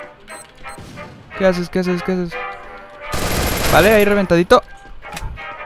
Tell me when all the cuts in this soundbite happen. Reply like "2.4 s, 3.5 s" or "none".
none